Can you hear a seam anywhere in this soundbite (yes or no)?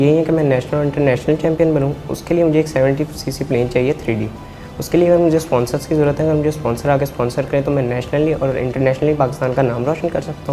no